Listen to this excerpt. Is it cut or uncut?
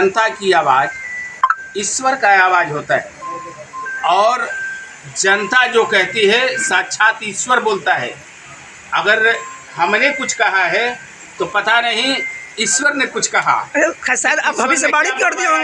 uncut